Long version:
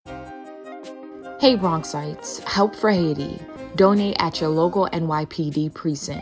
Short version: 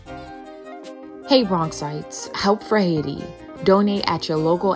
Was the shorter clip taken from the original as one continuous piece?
no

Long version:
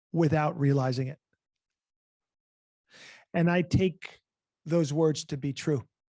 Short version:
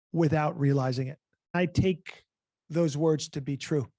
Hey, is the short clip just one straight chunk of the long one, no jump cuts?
no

